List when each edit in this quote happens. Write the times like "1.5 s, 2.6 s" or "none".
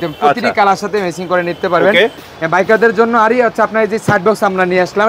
2.2 s